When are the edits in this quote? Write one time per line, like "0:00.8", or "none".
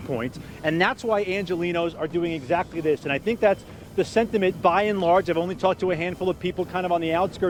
none